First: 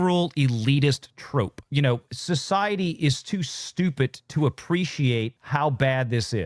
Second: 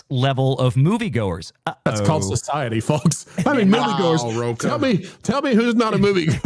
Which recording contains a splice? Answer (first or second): first